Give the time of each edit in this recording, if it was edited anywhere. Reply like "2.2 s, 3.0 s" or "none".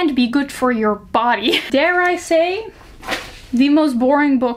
1.7 s